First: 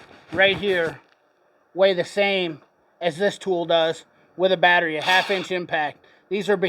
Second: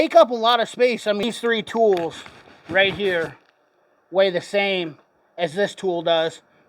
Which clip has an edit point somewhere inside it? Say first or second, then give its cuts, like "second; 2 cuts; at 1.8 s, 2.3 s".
second; 1 cut; at 1.2 s